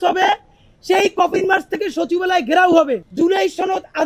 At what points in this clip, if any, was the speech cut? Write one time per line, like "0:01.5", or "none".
0:03.1